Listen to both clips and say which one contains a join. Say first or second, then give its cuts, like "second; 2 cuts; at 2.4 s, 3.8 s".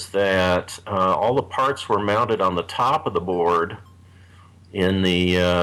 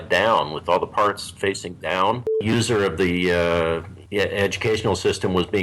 second; 2 cuts; at 2.4 s, 3.9 s